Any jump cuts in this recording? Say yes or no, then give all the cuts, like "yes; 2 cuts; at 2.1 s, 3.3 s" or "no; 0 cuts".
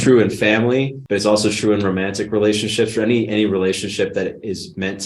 yes; 1 cut; at 1.0 s